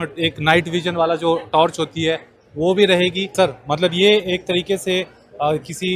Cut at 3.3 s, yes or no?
yes